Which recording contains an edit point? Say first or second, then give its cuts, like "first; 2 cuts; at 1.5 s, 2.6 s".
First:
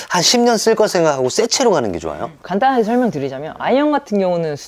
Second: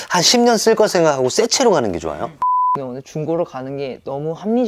second; 1 cut; at 2.5 s